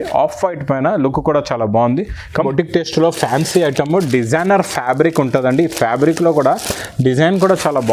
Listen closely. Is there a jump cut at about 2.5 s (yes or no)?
yes